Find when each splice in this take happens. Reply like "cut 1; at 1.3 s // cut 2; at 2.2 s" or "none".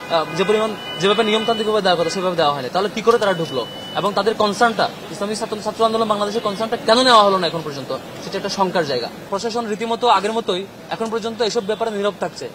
cut 1; at 9.2 s